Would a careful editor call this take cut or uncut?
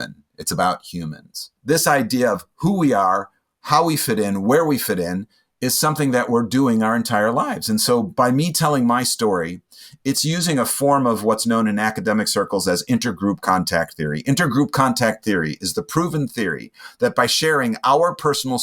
cut